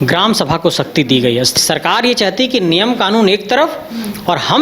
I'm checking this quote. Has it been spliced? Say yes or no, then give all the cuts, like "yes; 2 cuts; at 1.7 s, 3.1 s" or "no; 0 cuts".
yes; 1 cut; at 1.6 s